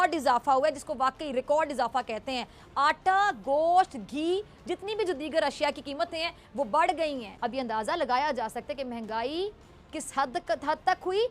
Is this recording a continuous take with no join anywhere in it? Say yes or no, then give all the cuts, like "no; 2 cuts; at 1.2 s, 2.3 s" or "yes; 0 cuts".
no; 1 cut; at 7.3 s